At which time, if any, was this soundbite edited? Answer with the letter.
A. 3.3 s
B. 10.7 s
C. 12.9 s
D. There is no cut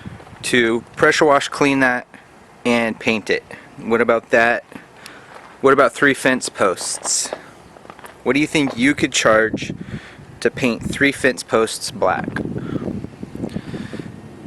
C